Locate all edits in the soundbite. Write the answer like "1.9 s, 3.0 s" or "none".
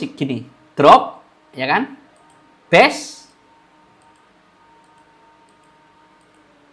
none

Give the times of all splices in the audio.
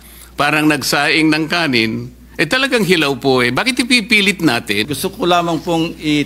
4.9 s

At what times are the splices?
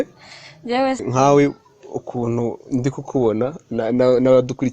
1.0 s

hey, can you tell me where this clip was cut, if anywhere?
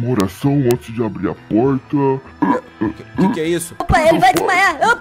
2.3 s, 3.9 s

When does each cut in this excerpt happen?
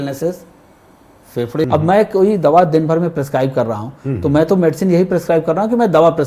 1.6 s

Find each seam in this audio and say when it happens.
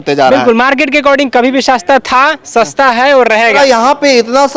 3.6 s

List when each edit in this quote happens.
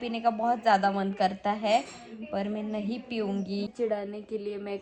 3.7 s

